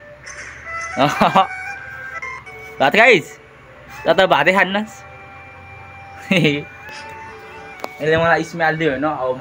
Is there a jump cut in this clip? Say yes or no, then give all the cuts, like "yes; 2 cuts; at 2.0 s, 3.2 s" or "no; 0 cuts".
no; 0 cuts